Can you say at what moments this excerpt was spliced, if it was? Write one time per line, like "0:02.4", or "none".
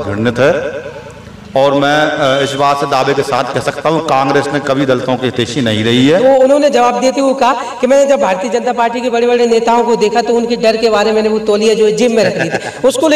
0:06.2

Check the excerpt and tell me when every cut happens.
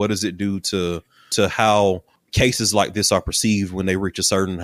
0:01.3
0:02.2

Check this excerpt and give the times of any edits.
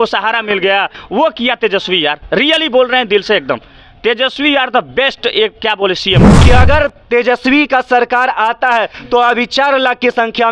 0:06.3

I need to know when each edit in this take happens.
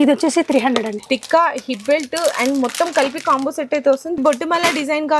0:01.0
0:04.2

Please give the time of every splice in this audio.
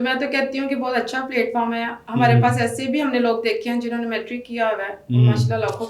none

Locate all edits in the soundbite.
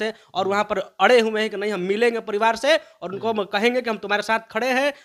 none

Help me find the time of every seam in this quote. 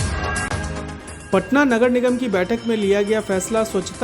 0:00.9

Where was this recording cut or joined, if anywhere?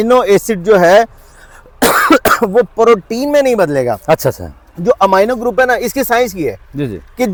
none

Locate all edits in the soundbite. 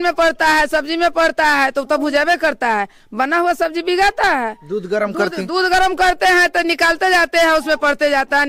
none

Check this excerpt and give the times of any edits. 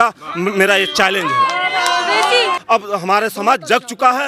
0:02.6

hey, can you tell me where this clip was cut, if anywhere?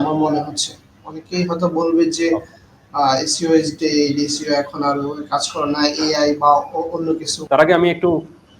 0:07.3

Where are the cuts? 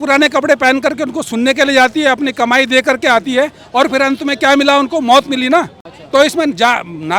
none

